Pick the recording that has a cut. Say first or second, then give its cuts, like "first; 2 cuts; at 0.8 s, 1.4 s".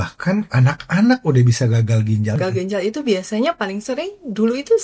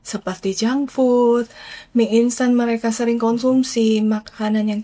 first; 1 cut; at 2.4 s